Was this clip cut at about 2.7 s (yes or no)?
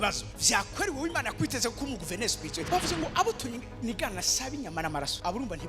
yes